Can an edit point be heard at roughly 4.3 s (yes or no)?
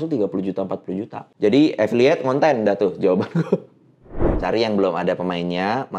yes